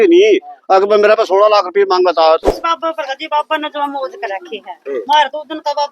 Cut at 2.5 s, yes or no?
yes